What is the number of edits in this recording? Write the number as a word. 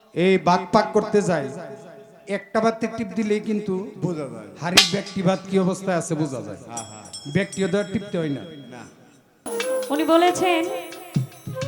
one